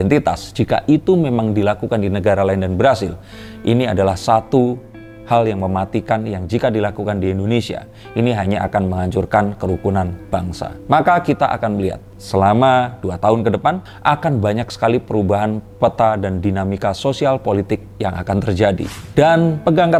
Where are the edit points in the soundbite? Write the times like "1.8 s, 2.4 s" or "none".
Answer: none

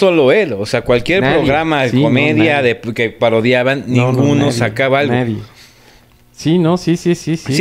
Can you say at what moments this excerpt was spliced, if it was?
none

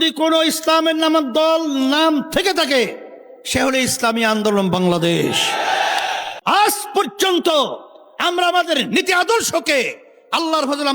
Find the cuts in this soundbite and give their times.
6.3 s

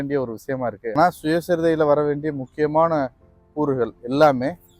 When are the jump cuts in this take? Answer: 1.0 s

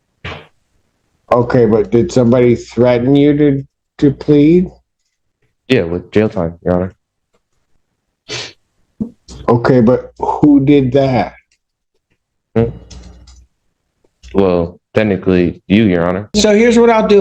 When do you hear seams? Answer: 16.3 s

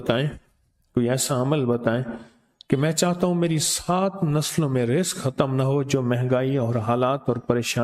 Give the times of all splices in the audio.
none

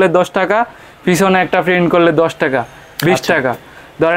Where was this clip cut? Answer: none

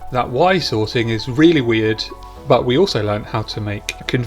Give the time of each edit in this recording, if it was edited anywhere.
2.2 s

